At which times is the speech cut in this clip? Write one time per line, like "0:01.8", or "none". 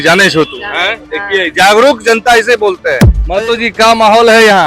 0:03.1